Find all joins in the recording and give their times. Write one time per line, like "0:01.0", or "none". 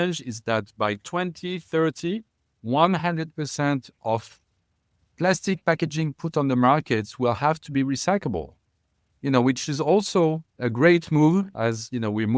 none